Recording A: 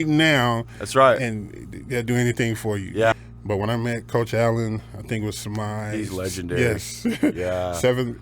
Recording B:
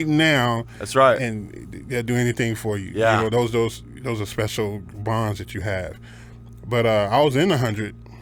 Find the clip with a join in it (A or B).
A